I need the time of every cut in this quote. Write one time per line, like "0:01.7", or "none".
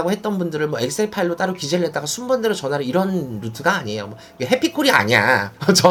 none